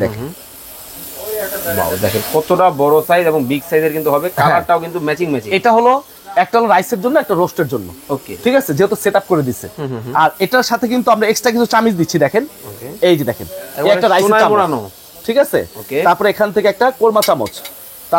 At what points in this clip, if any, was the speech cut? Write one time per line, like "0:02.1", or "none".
none